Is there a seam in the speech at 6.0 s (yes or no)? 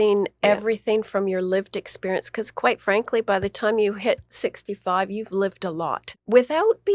yes